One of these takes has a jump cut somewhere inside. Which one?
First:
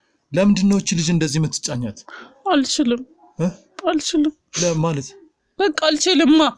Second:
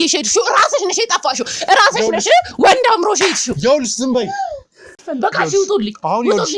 second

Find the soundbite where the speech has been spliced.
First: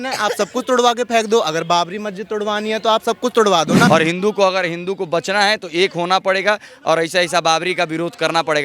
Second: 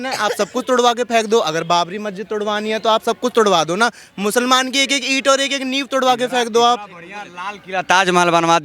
first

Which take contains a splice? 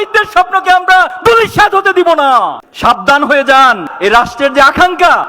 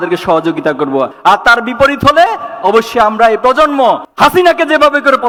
first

